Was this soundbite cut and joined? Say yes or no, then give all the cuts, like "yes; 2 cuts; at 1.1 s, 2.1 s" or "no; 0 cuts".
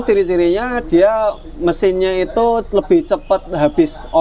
no; 0 cuts